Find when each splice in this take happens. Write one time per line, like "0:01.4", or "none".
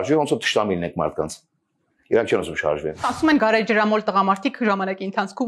0:03.1